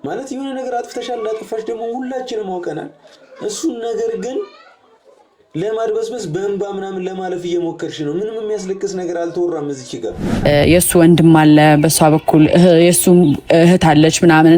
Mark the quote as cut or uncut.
cut